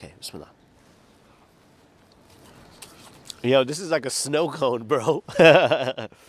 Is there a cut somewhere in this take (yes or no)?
no